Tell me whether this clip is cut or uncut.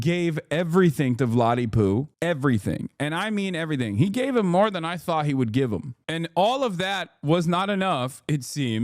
cut